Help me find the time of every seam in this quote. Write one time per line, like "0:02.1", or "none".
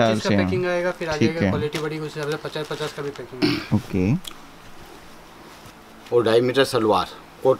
0:03.4